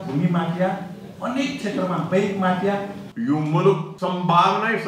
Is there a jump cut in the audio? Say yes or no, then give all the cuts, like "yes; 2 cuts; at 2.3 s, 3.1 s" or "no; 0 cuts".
yes; 2 cuts; at 3.0 s, 3.9 s